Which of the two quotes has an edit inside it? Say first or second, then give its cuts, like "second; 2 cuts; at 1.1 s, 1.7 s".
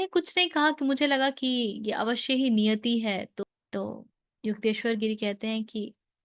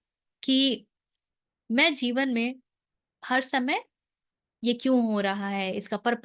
first; 1 cut; at 3.4 s